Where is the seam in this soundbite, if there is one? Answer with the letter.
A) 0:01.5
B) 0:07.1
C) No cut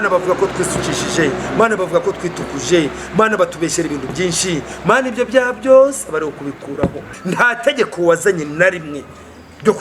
B